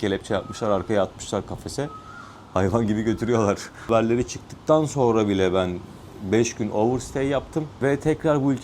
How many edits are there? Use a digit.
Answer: 2